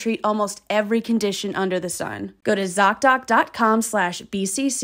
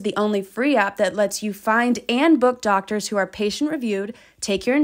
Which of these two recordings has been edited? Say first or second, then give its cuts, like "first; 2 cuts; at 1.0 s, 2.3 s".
first; 1 cut; at 2.3 s